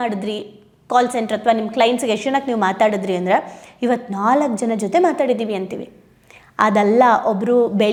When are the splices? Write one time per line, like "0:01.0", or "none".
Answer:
none